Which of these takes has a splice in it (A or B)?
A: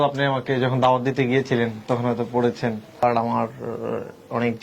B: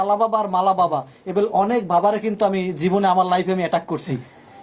A